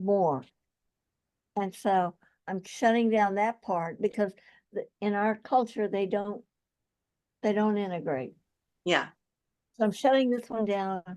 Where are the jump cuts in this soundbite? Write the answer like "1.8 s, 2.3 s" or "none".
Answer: none